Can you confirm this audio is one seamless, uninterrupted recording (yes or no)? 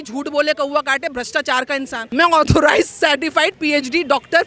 no